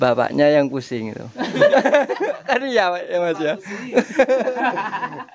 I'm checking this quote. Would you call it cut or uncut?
uncut